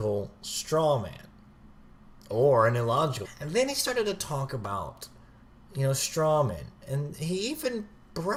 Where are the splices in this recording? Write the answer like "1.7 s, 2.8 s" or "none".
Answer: none

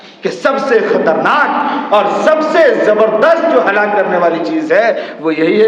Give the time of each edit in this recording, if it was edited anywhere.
none

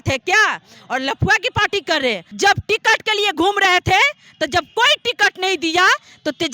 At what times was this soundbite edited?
2.3 s

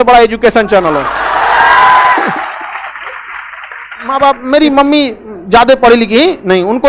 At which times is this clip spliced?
4.1 s

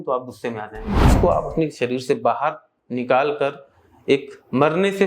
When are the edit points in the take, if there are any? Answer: 1.2 s

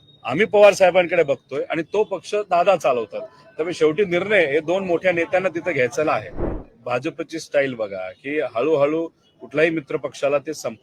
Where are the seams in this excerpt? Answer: 6.6 s

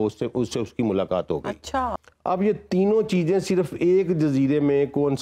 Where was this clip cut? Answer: 2.1 s

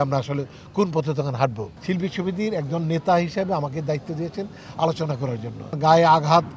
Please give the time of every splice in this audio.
1.7 s, 5.7 s

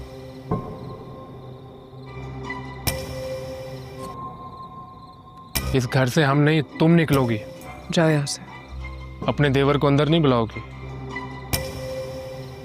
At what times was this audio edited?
none

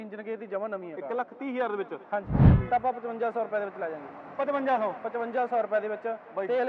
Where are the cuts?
2.4 s

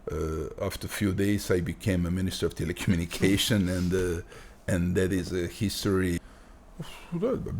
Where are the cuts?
6.2 s

